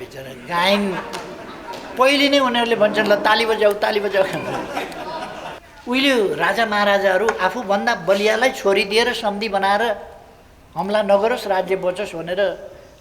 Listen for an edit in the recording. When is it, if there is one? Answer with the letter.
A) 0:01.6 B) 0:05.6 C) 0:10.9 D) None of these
B